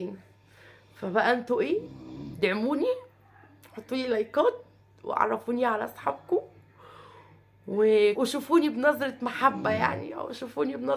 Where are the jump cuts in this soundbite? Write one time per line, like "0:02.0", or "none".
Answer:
0:08.2